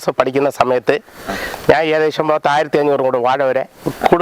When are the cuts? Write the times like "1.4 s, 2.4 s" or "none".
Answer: none